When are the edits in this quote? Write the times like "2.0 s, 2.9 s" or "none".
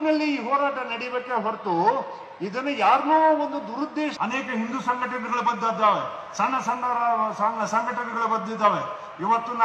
4.1 s